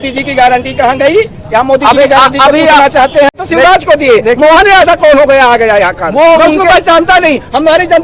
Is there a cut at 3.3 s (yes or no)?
yes